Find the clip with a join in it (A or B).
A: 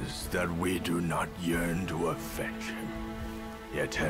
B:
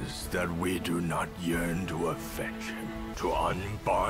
B